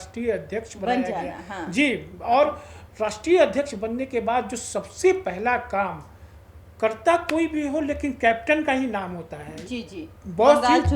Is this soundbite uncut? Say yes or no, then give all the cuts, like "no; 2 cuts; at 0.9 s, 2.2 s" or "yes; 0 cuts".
yes; 0 cuts